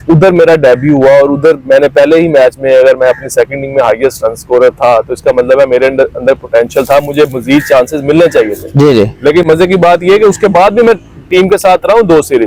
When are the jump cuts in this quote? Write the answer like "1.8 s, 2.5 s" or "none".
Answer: none